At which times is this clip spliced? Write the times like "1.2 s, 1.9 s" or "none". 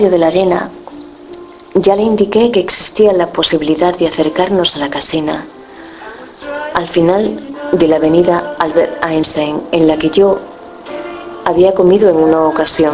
none

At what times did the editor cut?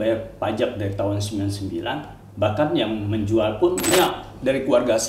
3.9 s

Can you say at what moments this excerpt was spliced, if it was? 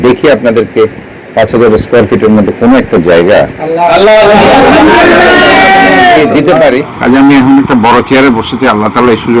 6.9 s

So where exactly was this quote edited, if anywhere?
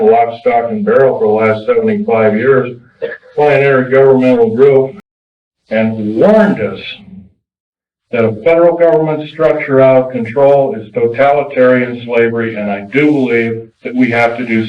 5.0 s

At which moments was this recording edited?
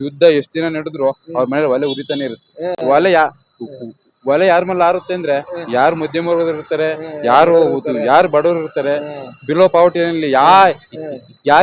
none

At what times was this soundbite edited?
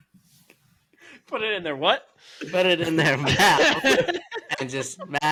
none

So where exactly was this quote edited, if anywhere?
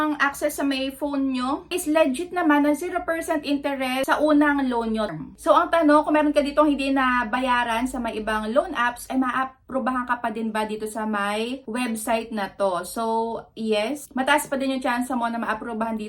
1.8 s, 5.1 s

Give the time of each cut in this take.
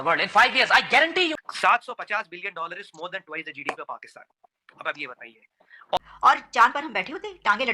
1.4 s, 6.0 s

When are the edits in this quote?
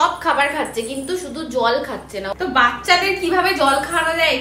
2.3 s

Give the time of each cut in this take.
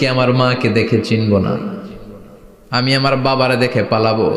none

